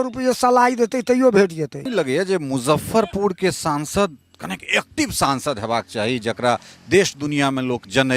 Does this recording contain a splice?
yes; 1 cut; at 1.9 s

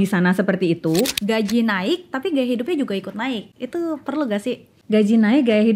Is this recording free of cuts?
no; 3 cuts; at 1.2 s, 3.5 s, 4.7 s

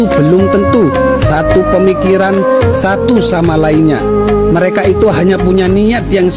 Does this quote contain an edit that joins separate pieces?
no; 0 cuts

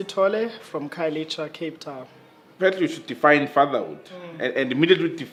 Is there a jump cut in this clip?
no; 0 cuts

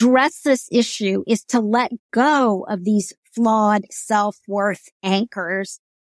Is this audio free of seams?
yes; 0 cuts

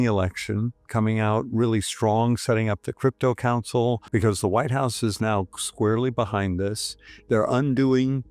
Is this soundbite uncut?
no; 1 cut; at 4.0 s

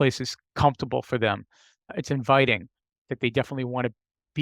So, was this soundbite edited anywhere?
yes; 1 cut; at 1.9 s

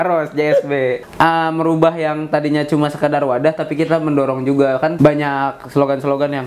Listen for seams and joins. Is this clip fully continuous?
no; 2 cuts; at 1.0 s, 4.9 s

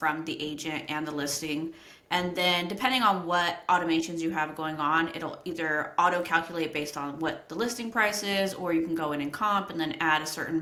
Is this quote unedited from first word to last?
yes; 0 cuts

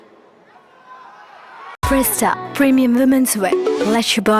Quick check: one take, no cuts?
no; 1 cut; at 1.8 s

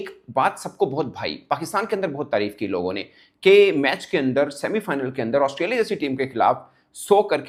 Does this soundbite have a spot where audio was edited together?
no; 0 cuts

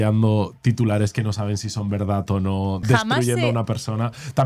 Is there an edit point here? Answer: no; 0 cuts

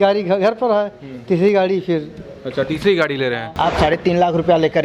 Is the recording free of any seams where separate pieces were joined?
no; 1 cut; at 3.5 s

